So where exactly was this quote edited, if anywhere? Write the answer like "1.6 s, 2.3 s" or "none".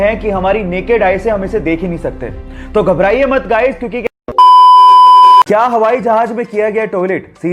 4.0 s, 5.4 s